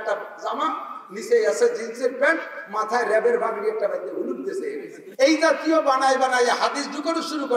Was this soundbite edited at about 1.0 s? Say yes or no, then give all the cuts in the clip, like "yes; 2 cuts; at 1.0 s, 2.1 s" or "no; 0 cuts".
no; 1 cut; at 5.0 s